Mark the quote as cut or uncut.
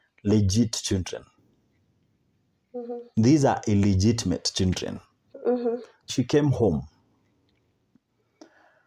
cut